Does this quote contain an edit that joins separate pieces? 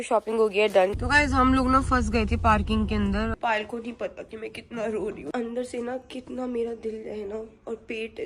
yes; 3 cuts; at 0.9 s, 3.3 s, 5.3 s

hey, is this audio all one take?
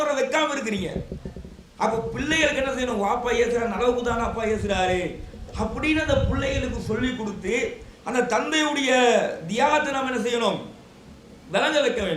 yes; 0 cuts

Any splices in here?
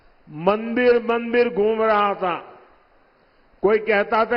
no; 0 cuts

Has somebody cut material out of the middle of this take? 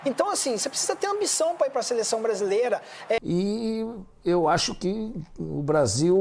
yes; 1 cut; at 3.2 s

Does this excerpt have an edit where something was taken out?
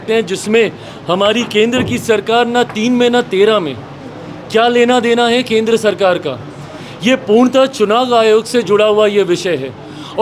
no; 0 cuts

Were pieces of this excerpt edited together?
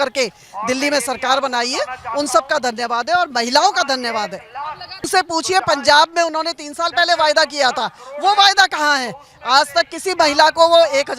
yes; 1 cut; at 5.1 s

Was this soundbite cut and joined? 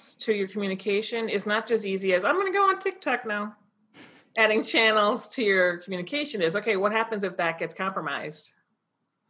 no; 0 cuts

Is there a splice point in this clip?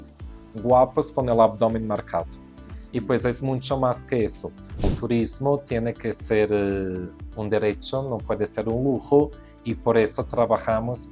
yes; 1 cut; at 4.9 s

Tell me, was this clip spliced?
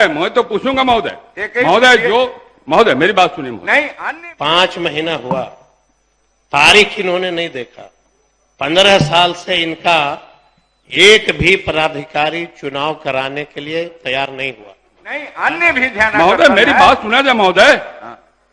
yes; 2 cuts; at 3.9 s, 15.3 s

